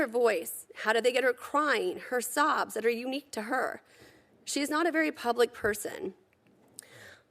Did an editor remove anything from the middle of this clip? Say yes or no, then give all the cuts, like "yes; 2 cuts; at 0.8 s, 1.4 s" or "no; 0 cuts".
no; 0 cuts